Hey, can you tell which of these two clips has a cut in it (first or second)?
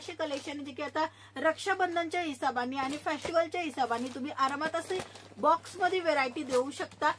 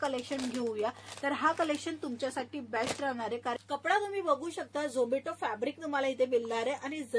second